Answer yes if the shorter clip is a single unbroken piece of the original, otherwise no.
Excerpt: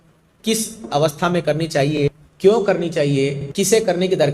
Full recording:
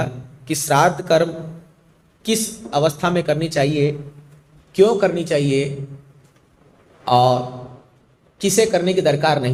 no